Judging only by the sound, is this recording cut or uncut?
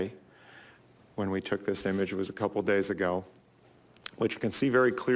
cut